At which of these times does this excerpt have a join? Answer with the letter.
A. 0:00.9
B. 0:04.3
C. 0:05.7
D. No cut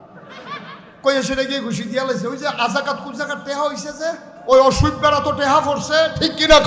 B